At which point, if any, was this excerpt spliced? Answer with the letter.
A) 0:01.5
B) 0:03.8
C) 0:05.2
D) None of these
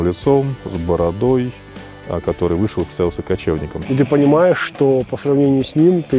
B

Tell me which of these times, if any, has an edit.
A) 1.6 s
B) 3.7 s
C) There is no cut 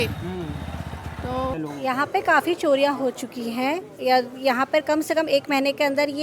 A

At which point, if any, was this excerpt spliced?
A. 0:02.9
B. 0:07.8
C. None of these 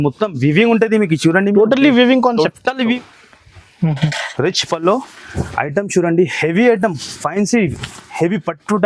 A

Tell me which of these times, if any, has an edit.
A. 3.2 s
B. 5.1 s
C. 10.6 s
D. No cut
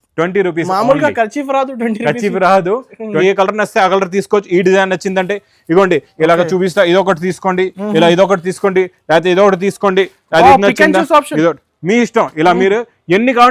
A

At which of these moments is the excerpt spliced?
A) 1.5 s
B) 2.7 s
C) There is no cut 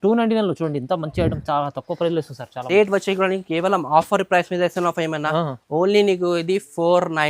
B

